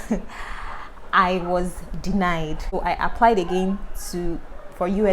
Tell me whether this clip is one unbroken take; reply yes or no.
no